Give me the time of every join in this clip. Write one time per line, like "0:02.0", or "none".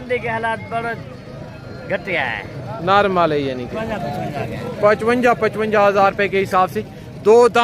0:03.8